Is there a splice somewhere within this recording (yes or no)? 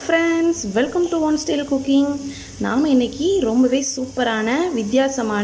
no